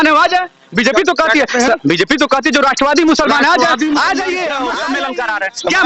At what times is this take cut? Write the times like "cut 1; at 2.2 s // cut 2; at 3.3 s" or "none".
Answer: cut 1; at 4.7 s